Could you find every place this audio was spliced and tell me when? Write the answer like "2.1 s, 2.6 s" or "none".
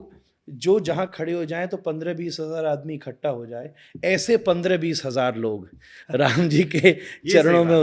none